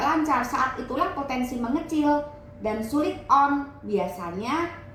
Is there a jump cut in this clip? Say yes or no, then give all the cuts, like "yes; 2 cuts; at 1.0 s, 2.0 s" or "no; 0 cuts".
no; 0 cuts